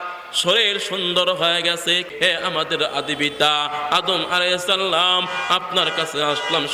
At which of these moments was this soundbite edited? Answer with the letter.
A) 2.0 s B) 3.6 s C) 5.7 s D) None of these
A